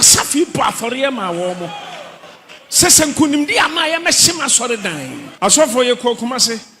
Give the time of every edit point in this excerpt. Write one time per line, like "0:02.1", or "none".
0:05.2